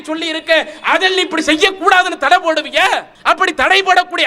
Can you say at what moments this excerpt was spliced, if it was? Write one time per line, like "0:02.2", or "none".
0:03.1